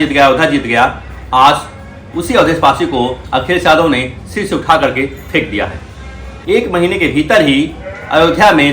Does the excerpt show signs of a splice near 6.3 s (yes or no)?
yes